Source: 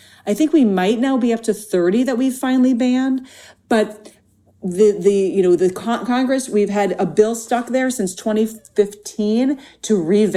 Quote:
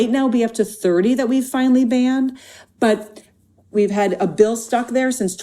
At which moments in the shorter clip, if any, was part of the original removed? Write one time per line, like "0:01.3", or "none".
0:03.7